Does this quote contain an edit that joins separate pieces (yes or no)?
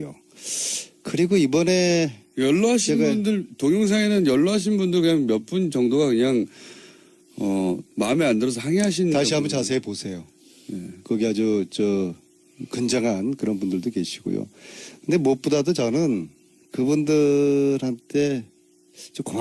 yes